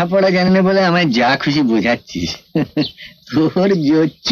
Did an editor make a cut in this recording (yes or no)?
no